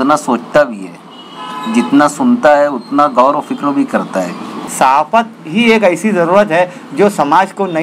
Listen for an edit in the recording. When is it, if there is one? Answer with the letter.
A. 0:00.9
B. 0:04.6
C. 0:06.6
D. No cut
B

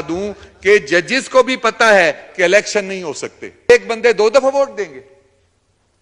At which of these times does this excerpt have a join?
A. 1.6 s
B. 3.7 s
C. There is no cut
B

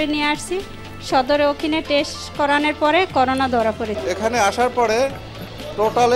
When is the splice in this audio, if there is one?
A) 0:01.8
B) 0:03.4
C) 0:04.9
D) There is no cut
D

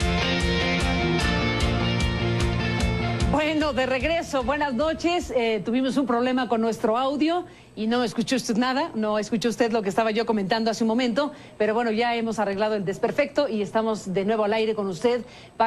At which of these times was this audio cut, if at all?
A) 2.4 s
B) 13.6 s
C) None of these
A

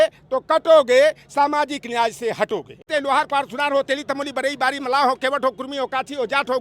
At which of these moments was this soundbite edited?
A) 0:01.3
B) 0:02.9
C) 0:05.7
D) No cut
B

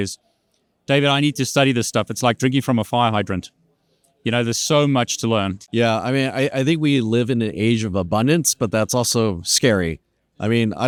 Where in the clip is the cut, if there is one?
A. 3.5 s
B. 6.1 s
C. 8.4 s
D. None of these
D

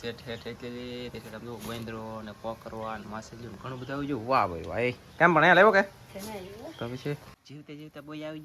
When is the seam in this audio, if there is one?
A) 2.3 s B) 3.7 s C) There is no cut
C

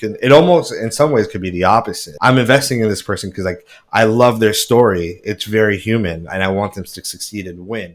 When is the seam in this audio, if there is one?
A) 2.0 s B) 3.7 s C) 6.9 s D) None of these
A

